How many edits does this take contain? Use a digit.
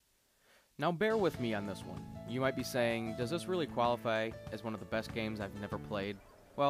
1